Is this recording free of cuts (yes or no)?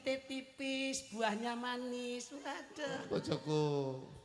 yes